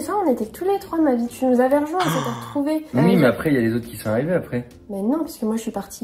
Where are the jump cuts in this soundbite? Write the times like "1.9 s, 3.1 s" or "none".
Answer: 2.9 s

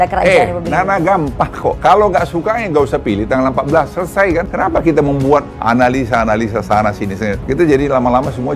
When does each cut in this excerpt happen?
1.8 s, 4.5 s, 5.5 s, 7.4 s

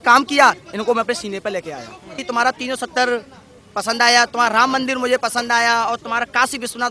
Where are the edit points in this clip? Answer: 2.2 s

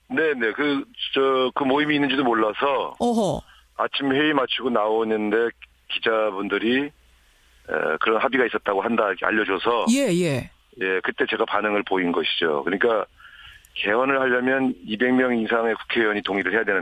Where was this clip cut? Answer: 6.3 s

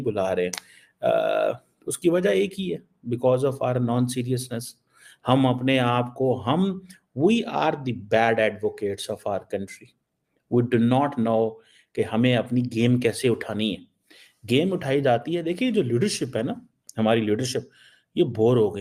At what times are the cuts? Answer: none

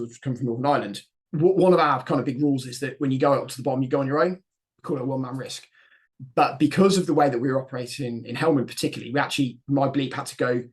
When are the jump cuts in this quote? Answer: 1.2 s

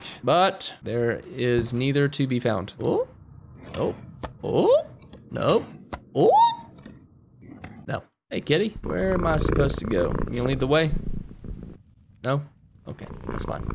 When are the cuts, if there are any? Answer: 8.2 s

